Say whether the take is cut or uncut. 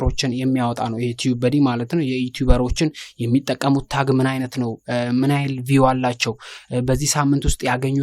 uncut